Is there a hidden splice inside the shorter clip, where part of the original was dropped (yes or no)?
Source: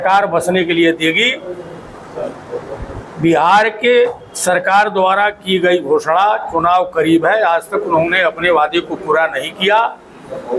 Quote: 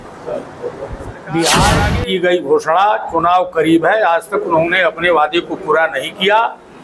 yes